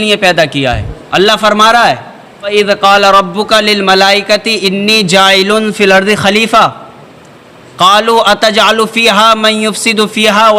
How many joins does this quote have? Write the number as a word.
one